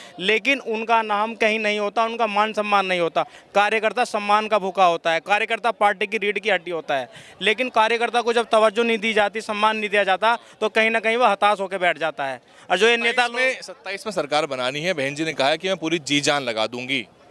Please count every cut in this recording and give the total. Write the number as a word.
zero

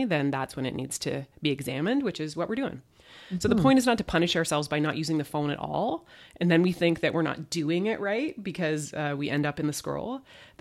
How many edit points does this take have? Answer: zero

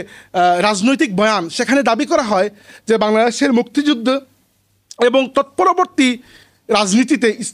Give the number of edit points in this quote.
zero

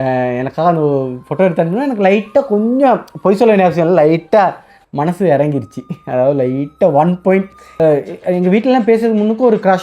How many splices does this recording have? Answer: one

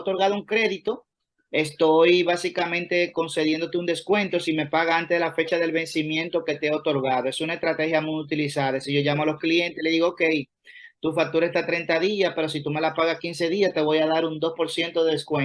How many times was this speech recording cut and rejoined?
zero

